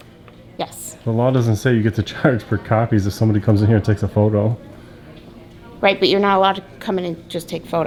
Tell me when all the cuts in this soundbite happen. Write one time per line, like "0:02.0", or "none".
none